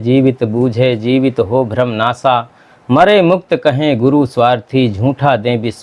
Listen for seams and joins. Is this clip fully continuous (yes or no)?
yes